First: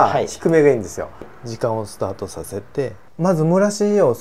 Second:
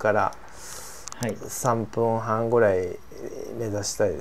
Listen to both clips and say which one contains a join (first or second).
first